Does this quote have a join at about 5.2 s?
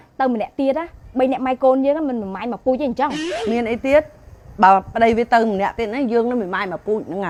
no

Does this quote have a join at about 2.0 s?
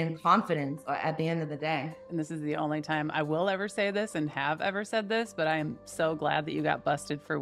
yes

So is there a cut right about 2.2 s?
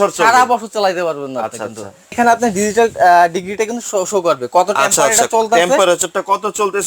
yes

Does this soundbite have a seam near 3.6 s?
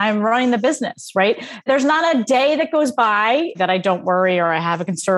yes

